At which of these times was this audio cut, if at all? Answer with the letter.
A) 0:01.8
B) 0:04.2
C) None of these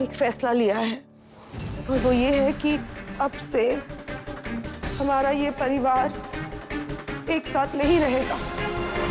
A